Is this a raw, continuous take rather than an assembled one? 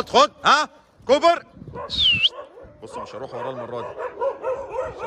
yes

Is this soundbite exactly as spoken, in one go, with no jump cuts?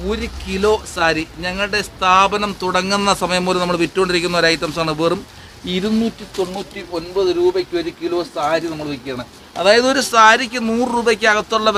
yes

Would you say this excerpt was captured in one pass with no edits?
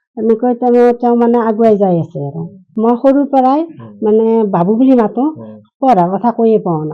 yes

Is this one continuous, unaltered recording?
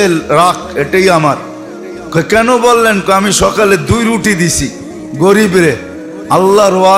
yes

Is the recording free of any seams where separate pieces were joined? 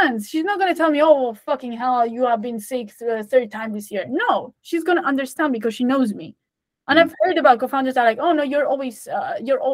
yes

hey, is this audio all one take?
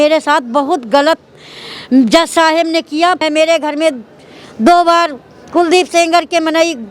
no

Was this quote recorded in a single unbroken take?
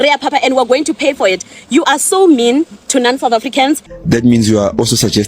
no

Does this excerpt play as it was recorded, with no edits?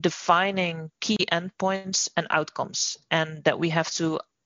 yes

